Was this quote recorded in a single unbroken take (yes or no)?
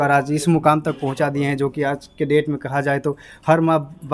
yes